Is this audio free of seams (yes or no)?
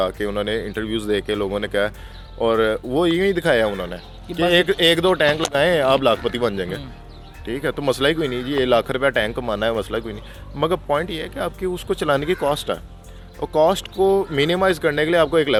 yes